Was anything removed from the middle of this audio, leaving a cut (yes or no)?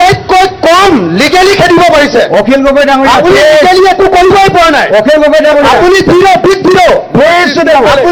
no